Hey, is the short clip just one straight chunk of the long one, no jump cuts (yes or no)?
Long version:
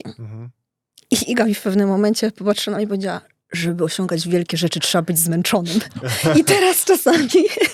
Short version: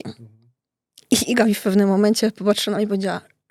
yes